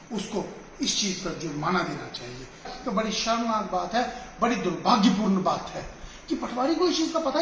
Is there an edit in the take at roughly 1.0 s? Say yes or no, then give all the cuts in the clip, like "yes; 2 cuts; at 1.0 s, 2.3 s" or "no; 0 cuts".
no; 1 cut; at 2.7 s